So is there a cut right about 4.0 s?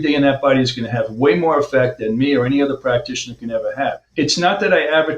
yes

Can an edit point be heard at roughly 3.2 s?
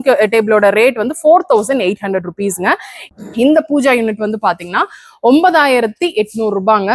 yes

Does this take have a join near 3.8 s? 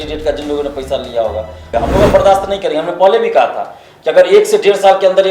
no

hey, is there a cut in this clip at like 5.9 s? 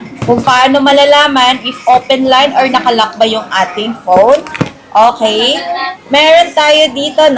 yes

